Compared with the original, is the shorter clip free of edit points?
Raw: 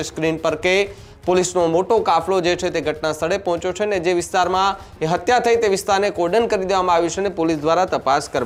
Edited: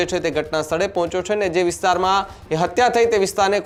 yes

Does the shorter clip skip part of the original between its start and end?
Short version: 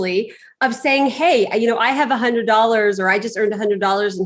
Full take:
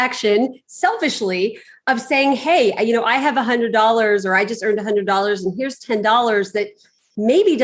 no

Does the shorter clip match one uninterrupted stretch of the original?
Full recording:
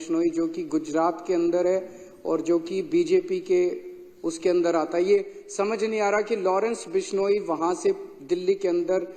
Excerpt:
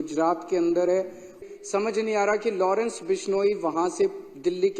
no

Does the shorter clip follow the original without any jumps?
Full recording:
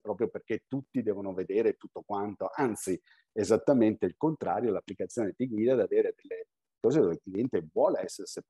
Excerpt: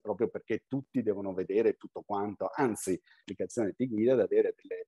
no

